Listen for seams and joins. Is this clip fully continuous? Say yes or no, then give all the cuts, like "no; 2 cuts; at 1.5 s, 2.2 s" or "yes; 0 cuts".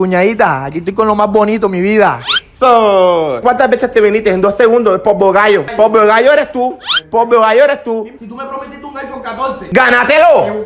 no; 3 cuts; at 3.4 s, 5.7 s, 8.1 s